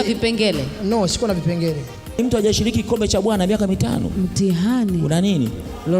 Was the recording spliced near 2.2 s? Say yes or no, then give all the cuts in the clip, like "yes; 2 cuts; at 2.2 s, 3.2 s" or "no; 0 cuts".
yes; 1 cut; at 2.2 s